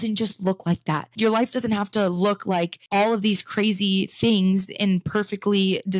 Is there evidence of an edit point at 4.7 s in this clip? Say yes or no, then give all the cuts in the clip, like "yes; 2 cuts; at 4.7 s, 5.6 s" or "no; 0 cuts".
no; 2 cuts; at 1.1 s, 2.8 s